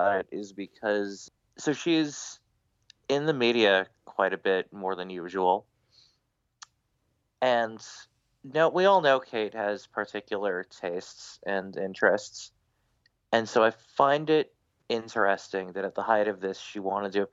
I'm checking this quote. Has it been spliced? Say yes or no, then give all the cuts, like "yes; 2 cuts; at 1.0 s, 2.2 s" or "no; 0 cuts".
yes; 1 cut; at 1.2 s